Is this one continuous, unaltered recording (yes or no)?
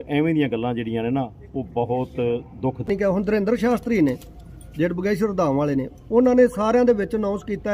no